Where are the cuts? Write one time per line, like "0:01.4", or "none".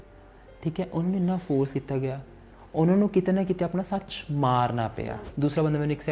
0:05.0